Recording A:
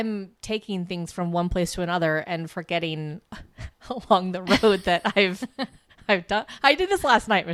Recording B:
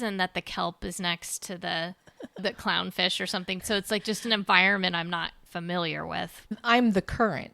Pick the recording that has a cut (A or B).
B